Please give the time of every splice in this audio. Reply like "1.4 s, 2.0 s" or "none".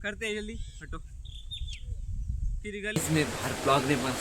2.9 s